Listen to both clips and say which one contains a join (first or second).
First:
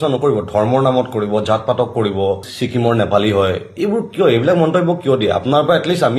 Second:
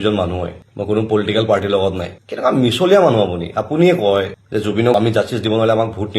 second